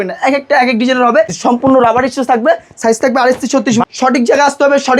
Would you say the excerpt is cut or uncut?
cut